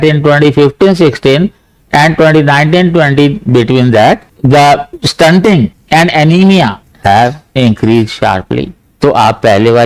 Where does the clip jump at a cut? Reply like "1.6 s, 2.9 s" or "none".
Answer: none